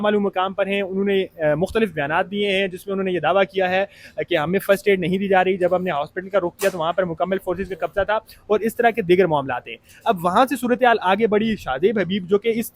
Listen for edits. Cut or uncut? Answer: uncut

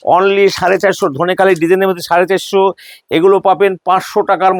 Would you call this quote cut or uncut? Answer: uncut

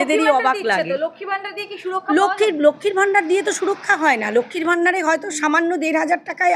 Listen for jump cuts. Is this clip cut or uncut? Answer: uncut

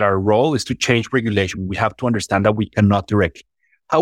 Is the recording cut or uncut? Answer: cut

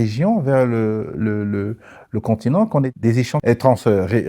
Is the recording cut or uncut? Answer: cut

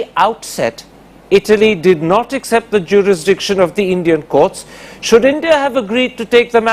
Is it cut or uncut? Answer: cut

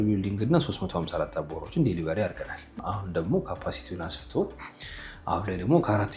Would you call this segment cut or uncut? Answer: cut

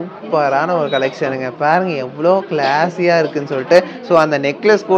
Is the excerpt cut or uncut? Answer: uncut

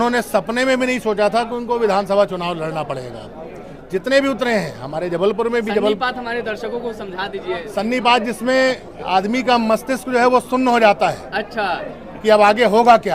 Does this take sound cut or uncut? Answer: uncut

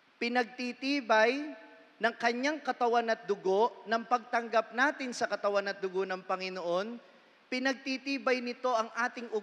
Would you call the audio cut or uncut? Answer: uncut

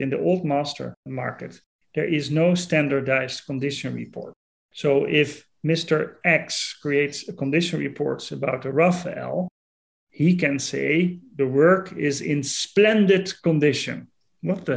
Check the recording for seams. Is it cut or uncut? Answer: cut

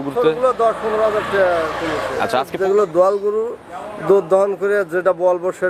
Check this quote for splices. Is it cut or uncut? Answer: cut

